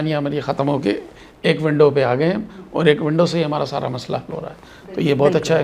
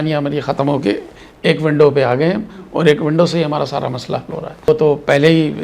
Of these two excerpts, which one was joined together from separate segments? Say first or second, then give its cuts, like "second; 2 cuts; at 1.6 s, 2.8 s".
second; 1 cut; at 4.7 s